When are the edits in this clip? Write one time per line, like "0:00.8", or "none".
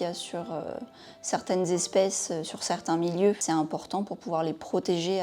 0:03.4